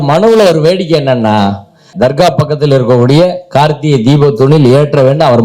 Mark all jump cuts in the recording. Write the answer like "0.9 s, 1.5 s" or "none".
1.9 s